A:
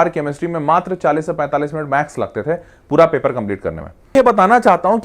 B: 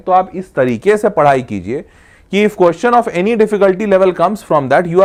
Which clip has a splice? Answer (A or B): A